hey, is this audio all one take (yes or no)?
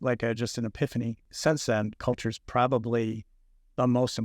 no